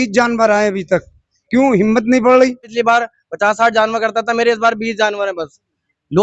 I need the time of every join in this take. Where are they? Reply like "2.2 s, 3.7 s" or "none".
2.7 s